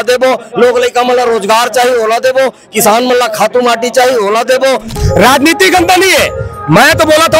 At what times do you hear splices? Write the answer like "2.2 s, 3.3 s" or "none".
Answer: 5.0 s